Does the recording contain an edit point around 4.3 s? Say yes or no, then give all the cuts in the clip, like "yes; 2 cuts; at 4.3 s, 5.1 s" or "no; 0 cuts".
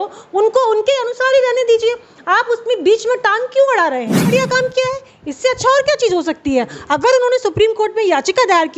yes; 1 cut; at 4.3 s